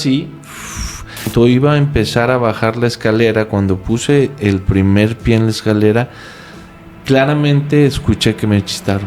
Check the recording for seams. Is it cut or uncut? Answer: cut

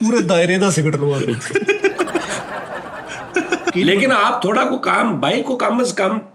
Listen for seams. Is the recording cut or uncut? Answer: cut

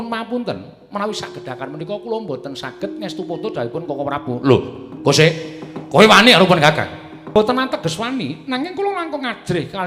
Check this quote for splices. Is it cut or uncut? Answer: cut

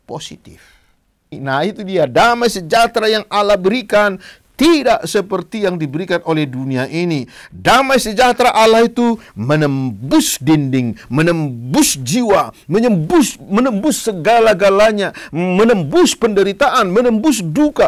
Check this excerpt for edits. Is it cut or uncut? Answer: cut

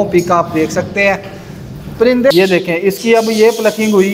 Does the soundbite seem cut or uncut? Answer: cut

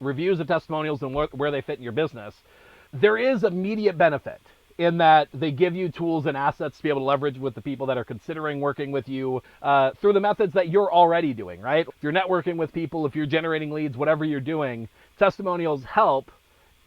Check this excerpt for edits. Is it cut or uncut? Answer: cut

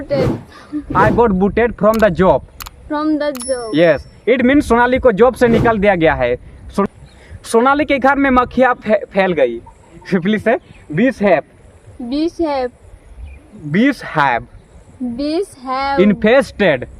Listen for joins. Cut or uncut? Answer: cut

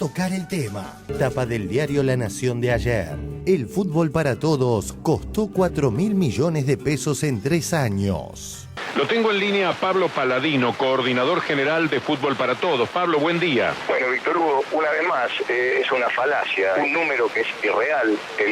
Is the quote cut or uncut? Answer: cut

